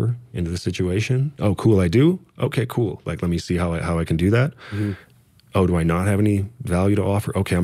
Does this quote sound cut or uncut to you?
cut